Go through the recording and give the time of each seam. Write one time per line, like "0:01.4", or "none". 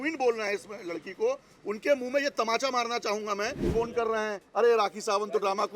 0:03.7

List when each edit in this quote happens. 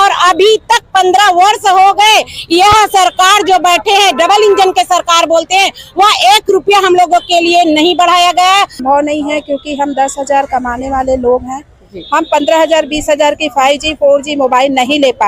0:08.8

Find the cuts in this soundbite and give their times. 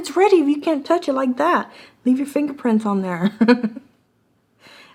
none

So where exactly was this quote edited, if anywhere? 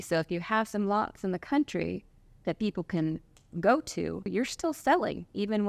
0:04.3

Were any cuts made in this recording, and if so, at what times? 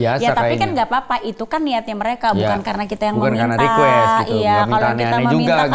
none

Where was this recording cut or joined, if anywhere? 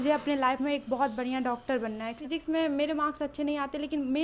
0:02.2

